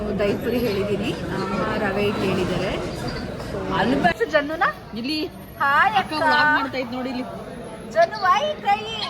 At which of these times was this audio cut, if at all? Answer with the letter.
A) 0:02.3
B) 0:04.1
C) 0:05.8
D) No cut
B